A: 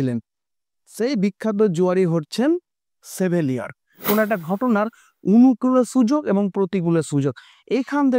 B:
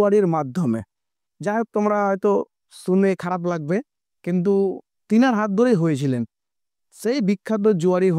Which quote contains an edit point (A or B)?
A